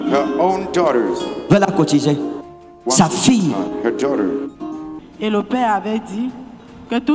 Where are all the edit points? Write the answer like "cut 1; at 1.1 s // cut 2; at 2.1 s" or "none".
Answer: cut 1; at 5.1 s